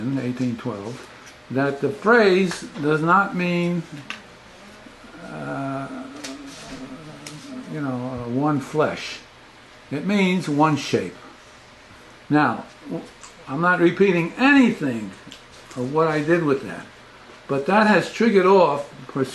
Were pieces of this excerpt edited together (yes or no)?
yes